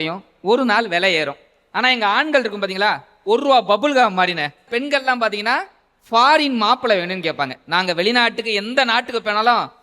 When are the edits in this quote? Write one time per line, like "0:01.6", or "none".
0:04.7